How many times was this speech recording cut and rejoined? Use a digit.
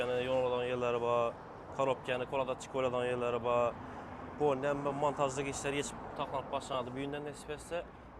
0